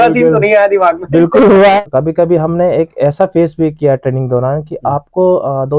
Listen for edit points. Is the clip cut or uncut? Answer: cut